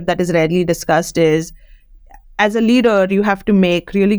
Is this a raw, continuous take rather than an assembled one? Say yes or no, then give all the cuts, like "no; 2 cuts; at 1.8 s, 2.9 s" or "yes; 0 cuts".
yes; 0 cuts